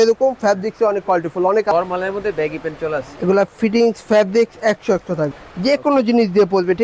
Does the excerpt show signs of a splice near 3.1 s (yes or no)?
no